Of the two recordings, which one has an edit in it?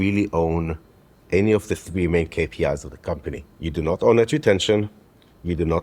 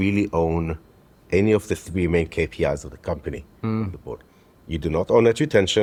first; 1 cut; at 3.5 s

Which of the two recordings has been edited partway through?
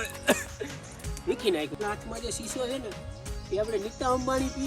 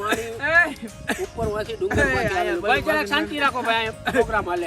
first; 1 cut; at 1.8 s

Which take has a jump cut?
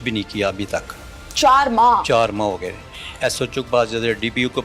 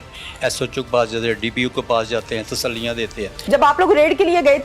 second; 1 cut; at 3.3 s

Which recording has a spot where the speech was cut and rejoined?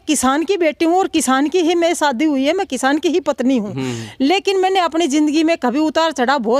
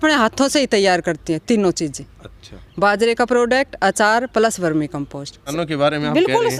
second; 1 cut; at 5.5 s

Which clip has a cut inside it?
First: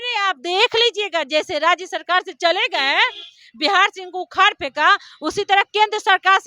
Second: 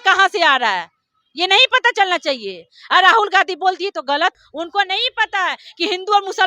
second; 1 cut; at 4.4 s

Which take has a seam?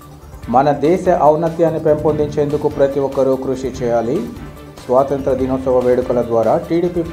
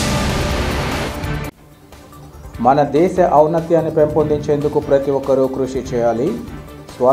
second; 1 cut; at 1.0 s

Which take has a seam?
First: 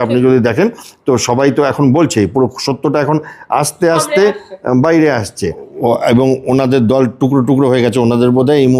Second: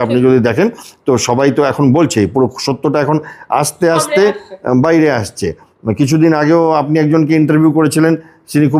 first; 1 cut; at 5.7 s

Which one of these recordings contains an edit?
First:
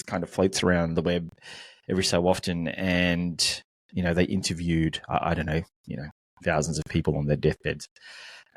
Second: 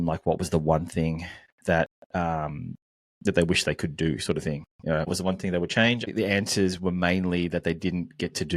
second; 2 cuts; at 5.1 s, 6.1 s

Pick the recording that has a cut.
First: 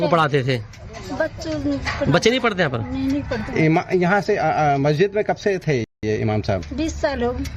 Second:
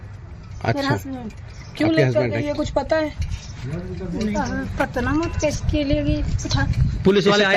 second; 1 cut; at 3.0 s

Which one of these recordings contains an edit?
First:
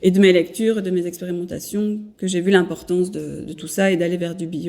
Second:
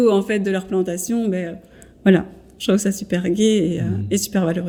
first; 1 cut; at 2.1 s

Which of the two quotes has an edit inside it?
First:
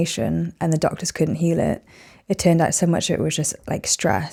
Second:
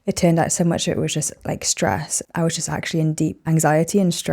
second; 1 cut; at 3.4 s

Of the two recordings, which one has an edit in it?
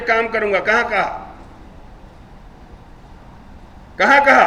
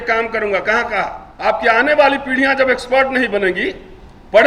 second; 1 cut; at 1.2 s

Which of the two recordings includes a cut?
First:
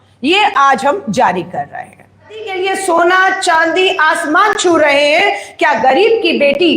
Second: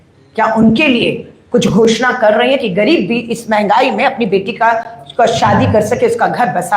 first; 1 cut; at 2.5 s

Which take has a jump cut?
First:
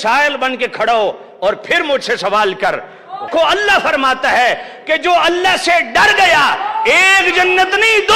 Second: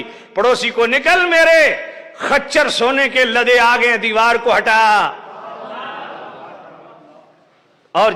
first; 1 cut; at 3.3 s

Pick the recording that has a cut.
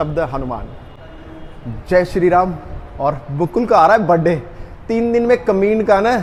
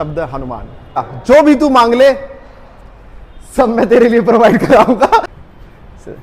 second; 2 cuts; at 1.1 s, 5.3 s

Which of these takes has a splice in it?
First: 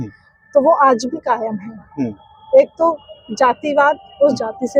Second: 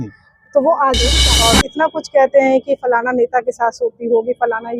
second; 1 cut; at 1.2 s

